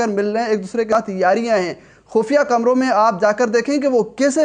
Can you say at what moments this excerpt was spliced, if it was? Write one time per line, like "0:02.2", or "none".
0:00.9